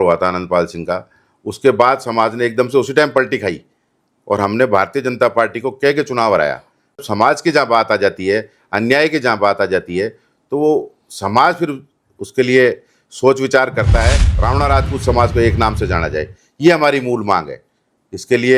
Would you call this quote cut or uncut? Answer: cut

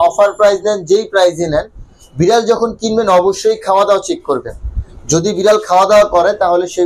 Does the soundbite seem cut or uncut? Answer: uncut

